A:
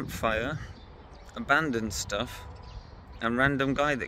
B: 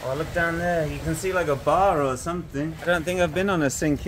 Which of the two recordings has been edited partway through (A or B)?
B